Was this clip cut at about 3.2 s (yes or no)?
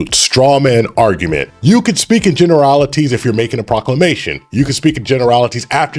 no